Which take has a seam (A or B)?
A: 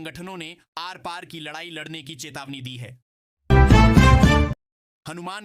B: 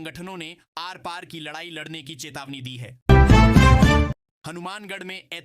B